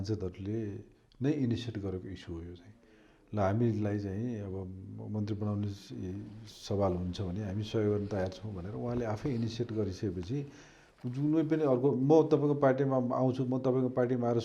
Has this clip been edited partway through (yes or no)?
no